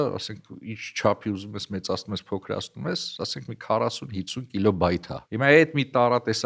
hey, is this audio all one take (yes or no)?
no